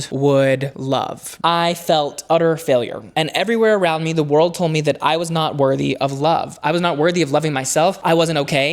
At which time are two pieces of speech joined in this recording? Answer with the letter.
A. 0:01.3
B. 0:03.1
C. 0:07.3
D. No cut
A